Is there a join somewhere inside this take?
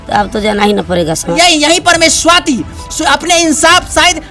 yes; 1 cut; at 1.3 s

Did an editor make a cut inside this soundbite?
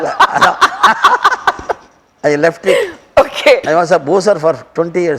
no; 0 cuts

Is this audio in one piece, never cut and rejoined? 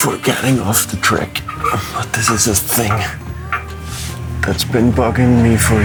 yes; 0 cuts

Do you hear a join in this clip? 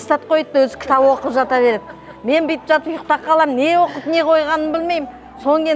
no; 0 cuts

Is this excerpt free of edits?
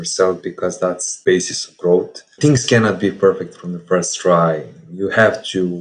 no; 1 cut; at 1.1 s

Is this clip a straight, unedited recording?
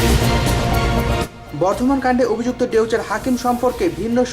yes; 0 cuts

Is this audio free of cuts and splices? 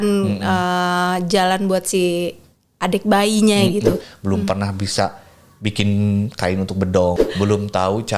no; 2 cuts; at 4.1 s, 7.2 s

